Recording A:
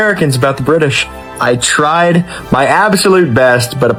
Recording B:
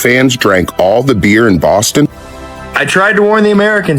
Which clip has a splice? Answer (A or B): B